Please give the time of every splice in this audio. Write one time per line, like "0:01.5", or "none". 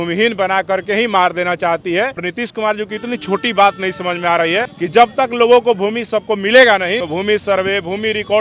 0:02.3
0:04.7
0:07.0

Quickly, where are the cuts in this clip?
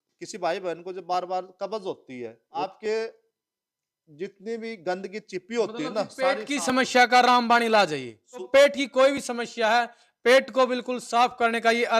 0:02.4
0:08.5

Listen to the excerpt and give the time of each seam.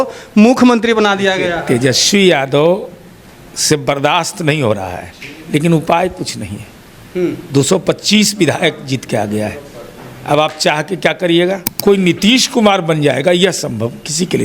0:11.7

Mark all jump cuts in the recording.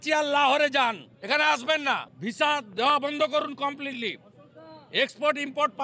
0:02.1

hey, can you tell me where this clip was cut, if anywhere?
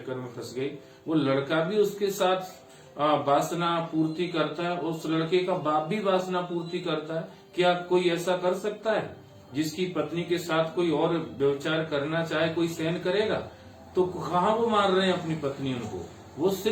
none

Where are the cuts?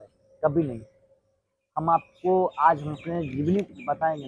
none

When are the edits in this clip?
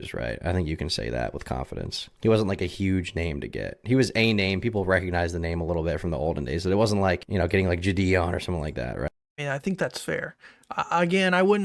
none

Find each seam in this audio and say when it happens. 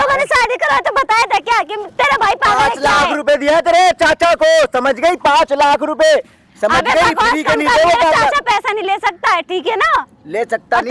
none

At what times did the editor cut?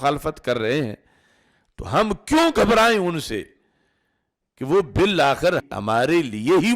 0:05.7

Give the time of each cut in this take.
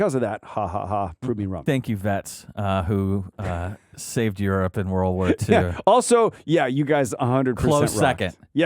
0:01.6

